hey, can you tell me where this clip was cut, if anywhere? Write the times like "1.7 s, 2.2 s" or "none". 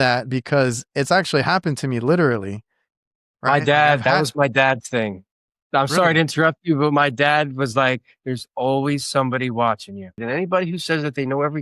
10.1 s